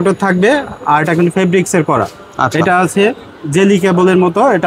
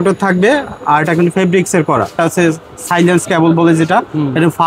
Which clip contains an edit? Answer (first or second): second